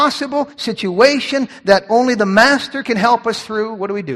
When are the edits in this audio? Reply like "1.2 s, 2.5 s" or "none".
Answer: none